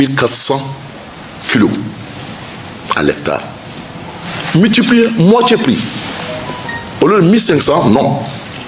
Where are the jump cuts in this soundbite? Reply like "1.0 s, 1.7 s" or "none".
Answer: none